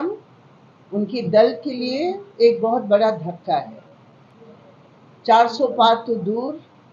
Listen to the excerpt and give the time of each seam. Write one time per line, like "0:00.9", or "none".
none